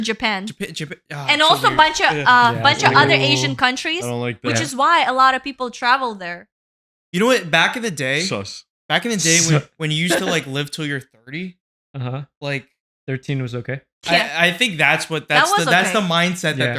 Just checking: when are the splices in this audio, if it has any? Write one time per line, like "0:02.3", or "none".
none